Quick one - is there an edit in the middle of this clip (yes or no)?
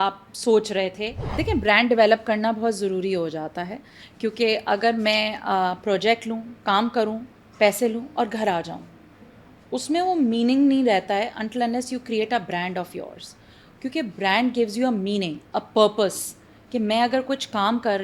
yes